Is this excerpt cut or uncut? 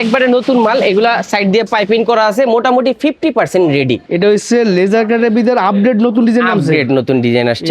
cut